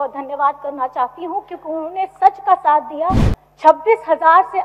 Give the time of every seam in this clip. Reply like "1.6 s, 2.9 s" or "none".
3.3 s